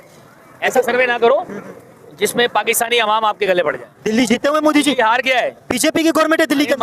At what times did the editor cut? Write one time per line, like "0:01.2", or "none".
0:03.9